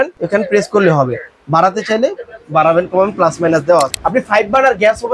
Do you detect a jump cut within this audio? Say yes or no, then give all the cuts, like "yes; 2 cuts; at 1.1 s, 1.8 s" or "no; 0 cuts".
yes; 1 cut; at 3.9 s